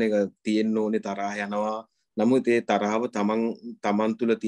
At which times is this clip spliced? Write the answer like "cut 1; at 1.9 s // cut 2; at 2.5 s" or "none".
none